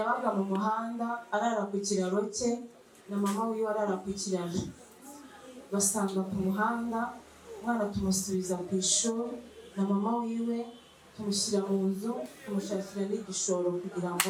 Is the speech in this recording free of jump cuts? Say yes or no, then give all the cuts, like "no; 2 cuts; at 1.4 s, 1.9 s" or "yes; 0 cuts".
yes; 0 cuts